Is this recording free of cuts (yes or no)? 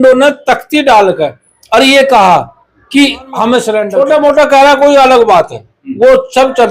no